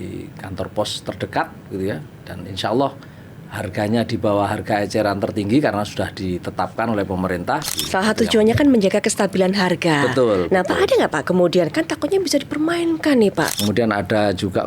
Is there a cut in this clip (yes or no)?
yes